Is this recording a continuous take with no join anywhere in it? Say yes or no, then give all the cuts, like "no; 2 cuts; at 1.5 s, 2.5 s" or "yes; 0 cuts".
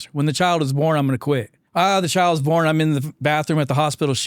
no; 1 cut; at 1.6 s